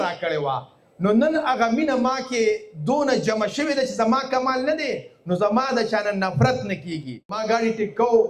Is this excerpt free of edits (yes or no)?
no